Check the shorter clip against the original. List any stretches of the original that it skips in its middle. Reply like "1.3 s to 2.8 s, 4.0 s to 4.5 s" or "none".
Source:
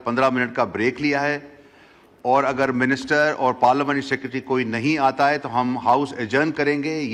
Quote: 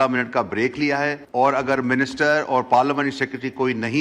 1.4 s to 2.1 s